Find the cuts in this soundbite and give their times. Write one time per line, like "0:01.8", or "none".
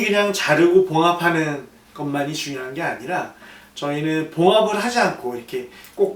none